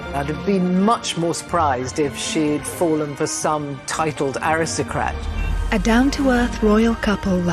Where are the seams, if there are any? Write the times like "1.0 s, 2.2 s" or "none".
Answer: none

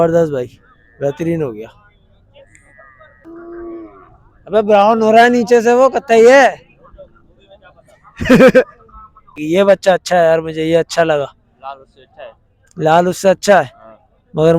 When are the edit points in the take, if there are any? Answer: 3.2 s, 9.3 s

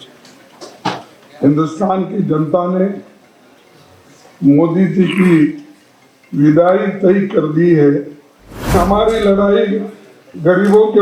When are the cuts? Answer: 8.7 s

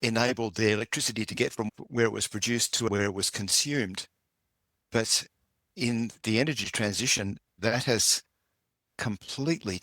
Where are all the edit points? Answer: 1.7 s, 2.9 s

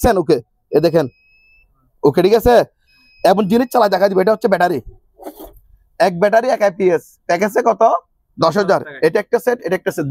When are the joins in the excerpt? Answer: none

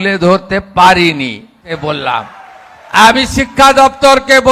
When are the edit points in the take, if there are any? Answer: 1.8 s

